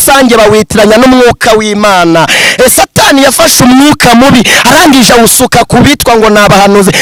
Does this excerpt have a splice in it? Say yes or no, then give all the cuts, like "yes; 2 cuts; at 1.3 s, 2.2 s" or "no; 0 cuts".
no; 0 cuts